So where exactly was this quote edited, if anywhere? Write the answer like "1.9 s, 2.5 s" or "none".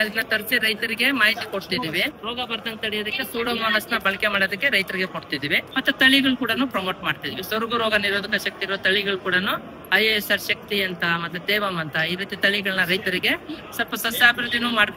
2.2 s, 5.7 s